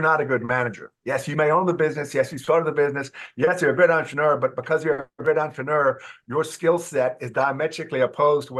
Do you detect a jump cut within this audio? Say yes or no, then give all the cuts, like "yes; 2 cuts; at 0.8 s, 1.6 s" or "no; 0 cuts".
no; 0 cuts